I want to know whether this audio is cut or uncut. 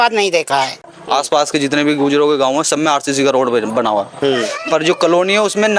cut